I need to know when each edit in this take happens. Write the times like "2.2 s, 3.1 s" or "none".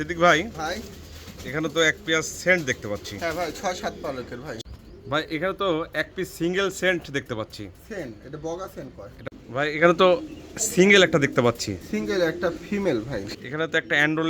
4.6 s, 9.3 s, 13.3 s